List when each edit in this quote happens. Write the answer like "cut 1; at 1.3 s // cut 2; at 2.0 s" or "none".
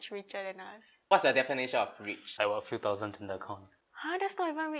cut 1; at 1.0 s // cut 2; at 2.2 s